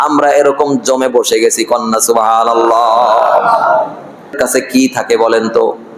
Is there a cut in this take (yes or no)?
yes